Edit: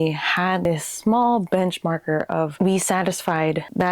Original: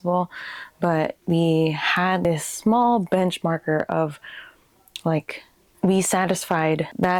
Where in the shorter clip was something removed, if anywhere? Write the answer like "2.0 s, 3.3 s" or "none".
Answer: 2.5 s